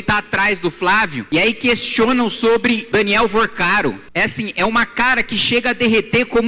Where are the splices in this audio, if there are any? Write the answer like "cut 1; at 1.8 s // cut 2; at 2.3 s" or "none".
cut 1; at 1.2 s // cut 2; at 2.8 s // cut 3; at 4.0 s